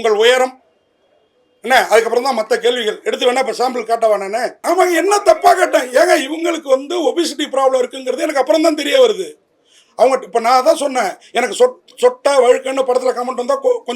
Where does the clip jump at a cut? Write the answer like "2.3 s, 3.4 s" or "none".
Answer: 4.6 s